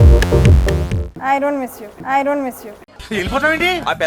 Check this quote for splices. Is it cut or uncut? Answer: cut